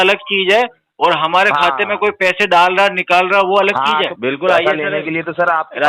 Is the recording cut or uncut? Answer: cut